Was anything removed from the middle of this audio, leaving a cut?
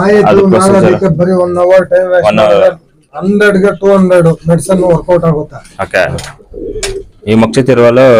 yes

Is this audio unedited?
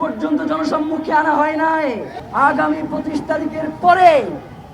no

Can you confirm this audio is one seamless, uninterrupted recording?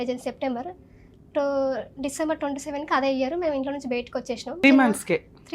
no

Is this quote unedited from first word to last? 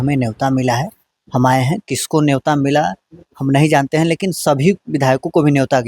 yes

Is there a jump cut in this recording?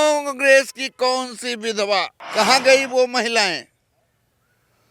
yes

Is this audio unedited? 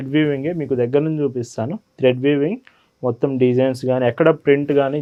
yes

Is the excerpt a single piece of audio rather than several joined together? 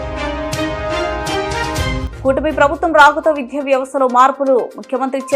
yes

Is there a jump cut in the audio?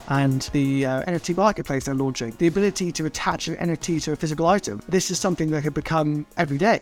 yes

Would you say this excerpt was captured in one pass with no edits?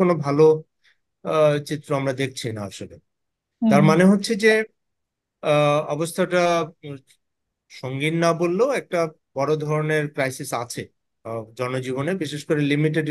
yes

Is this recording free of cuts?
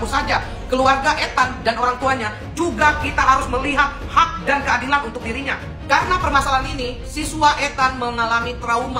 yes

